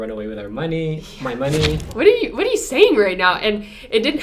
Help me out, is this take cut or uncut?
cut